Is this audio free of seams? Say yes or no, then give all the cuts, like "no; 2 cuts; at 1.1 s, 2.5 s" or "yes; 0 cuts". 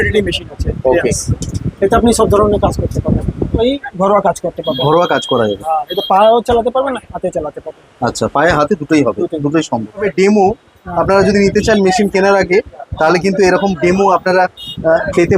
no; 2 cuts; at 3.6 s, 10.1 s